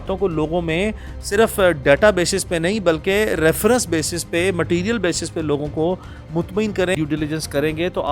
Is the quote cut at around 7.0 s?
yes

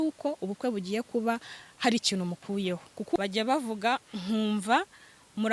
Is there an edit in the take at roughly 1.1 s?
no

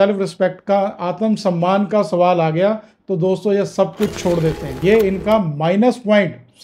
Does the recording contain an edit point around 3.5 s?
no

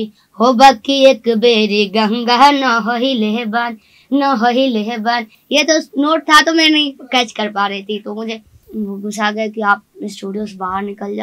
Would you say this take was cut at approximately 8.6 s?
yes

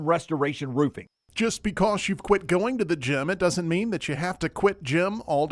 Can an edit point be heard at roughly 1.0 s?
yes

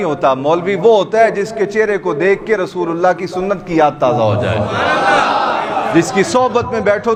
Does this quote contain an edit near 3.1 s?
no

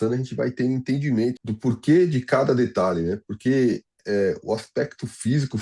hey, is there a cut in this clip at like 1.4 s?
yes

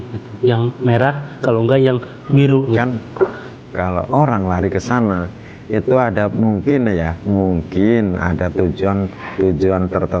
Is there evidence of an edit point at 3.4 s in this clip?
yes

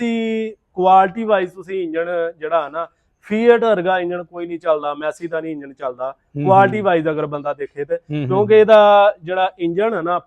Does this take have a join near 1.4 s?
no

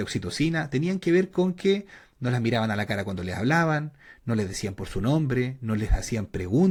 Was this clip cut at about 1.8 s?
no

